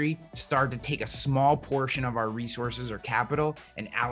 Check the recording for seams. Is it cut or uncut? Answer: uncut